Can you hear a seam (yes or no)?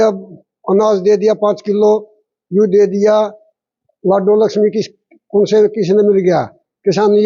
no